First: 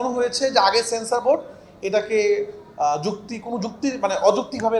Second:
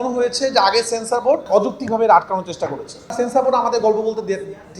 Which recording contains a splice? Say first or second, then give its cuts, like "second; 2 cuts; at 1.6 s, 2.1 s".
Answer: second; 2 cuts; at 1.5 s, 3.2 s